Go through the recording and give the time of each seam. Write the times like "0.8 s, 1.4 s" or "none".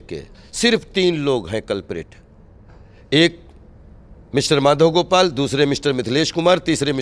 none